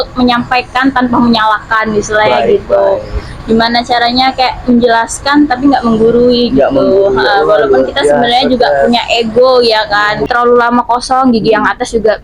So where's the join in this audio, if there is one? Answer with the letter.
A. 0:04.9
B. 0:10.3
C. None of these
B